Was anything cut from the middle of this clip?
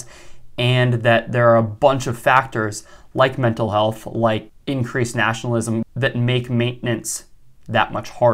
yes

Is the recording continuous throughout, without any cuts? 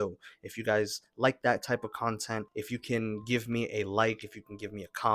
no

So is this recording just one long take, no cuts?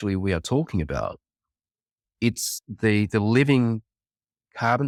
yes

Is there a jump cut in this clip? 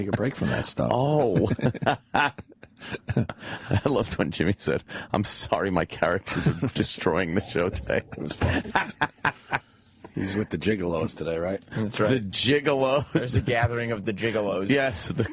yes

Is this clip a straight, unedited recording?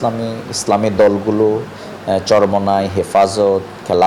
yes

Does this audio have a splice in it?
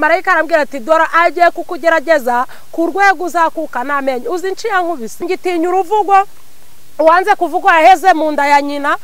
yes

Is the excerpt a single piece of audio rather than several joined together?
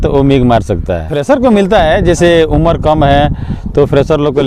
no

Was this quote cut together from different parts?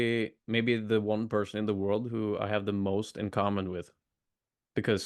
no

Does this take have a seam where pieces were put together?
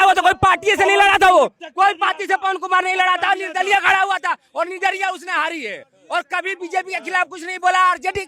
no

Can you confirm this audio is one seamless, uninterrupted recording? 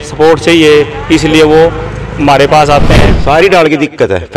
no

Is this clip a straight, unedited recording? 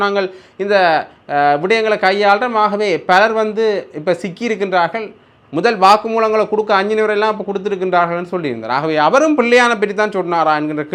yes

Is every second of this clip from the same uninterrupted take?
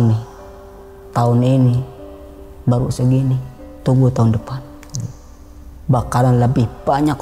yes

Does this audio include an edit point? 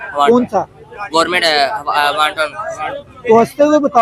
no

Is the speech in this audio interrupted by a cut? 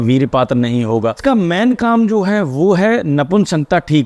yes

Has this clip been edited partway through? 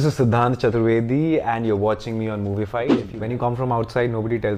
yes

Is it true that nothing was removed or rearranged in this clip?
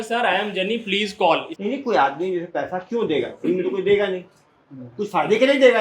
no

